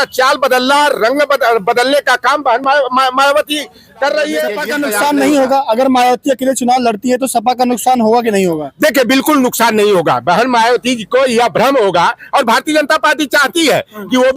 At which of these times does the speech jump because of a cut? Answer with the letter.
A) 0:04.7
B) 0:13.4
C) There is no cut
A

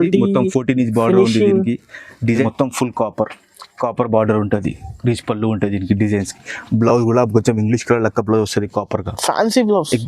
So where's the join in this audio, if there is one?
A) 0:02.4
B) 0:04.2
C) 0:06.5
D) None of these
A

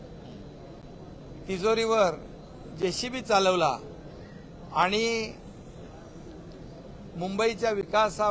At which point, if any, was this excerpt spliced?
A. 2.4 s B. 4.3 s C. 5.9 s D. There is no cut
D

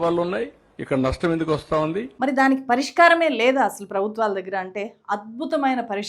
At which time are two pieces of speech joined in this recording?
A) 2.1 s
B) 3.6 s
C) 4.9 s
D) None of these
D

